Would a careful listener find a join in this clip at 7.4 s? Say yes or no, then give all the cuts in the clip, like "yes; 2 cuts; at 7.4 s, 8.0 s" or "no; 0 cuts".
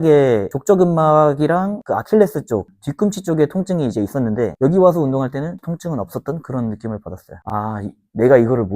yes; 2 cuts; at 4.5 s, 7.4 s